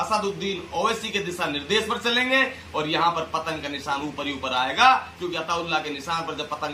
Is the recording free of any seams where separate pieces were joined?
yes; 0 cuts

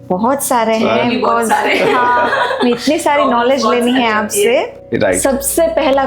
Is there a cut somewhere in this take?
yes; 1 cut; at 4.8 s

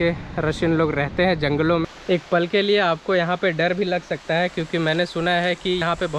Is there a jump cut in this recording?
yes; 1 cut; at 1.9 s

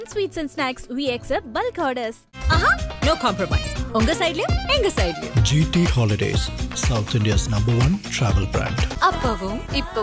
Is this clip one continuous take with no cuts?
yes; 0 cuts

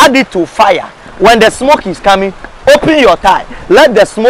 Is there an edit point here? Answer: no; 0 cuts

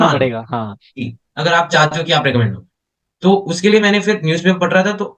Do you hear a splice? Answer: no; 0 cuts

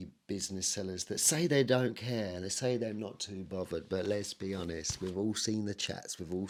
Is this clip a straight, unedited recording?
yes; 0 cuts

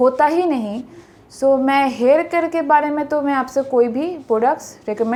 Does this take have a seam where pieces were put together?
no; 0 cuts

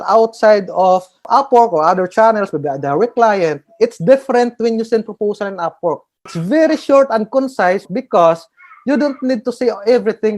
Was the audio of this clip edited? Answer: yes; 1 cut; at 7.8 s

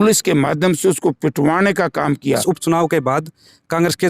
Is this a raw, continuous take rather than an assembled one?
no; 1 cut; at 2.4 s

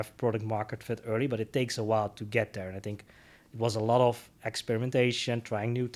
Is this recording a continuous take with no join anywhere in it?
yes; 0 cuts

